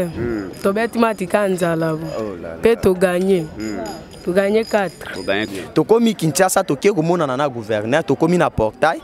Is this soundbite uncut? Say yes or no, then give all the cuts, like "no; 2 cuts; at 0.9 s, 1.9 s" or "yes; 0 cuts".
no; 1 cut; at 5.5 s